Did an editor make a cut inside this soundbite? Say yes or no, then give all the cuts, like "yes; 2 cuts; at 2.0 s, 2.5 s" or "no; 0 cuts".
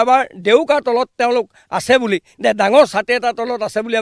no; 0 cuts